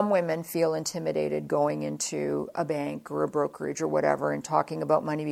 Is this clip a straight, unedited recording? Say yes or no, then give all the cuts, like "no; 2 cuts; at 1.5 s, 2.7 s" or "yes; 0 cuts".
yes; 0 cuts